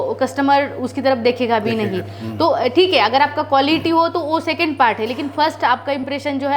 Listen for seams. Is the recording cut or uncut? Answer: uncut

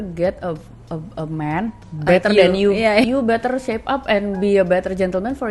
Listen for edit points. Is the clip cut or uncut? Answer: cut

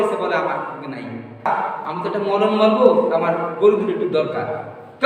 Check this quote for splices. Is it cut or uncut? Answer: cut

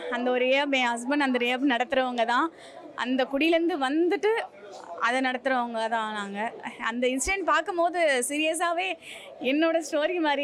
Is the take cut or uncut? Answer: uncut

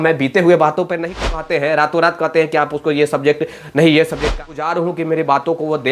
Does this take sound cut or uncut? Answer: cut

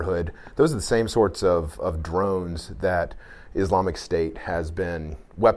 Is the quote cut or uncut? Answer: uncut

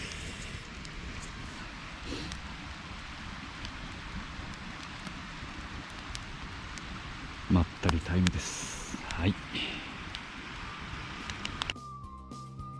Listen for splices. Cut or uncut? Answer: cut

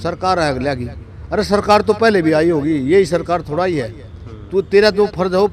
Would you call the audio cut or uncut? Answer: uncut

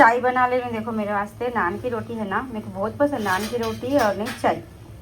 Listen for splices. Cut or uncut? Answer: uncut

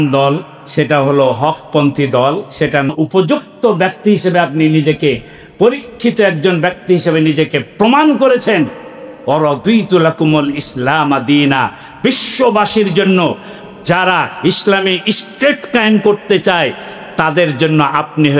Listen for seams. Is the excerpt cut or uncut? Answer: cut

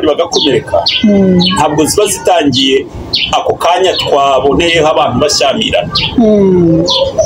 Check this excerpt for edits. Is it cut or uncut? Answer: uncut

